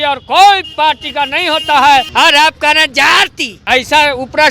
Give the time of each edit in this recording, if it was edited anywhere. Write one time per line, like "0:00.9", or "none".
0:02.1
0:03.5